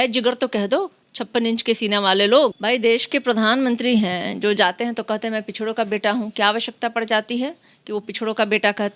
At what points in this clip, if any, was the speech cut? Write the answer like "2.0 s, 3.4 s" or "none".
2.6 s